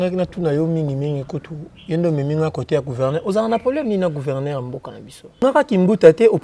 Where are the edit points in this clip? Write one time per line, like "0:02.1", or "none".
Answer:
0:05.4

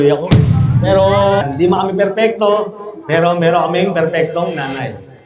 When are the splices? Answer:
0:01.4

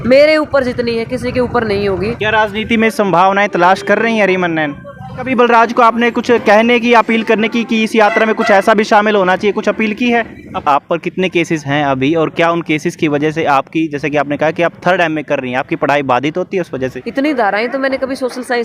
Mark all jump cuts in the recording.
0:02.2
0:05.3
0:10.6
0:17.0

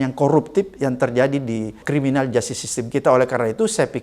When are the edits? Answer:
0:01.8

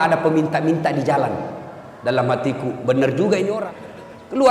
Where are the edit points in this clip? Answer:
0:03.6

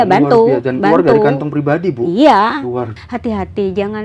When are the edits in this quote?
0:02.9

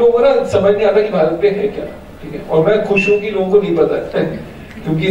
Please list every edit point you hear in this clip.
none

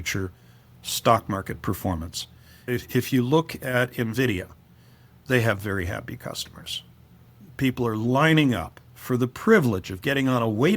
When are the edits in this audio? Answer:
0:02.5
0:05.2

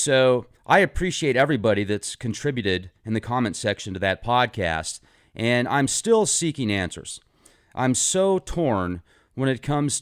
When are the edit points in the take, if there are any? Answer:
none

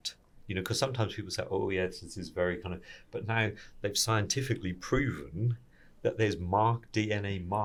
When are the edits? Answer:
none

